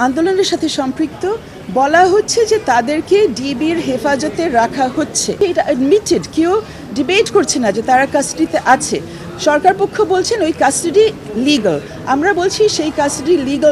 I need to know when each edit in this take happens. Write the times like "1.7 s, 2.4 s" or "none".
5.4 s